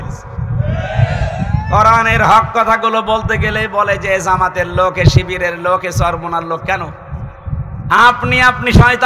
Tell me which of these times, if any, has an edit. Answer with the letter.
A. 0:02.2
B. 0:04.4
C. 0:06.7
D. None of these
D